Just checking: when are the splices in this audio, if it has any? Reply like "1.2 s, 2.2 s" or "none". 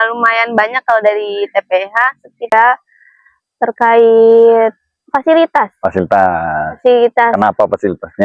2.5 s

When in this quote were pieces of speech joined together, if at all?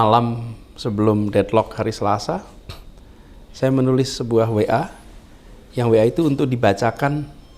none

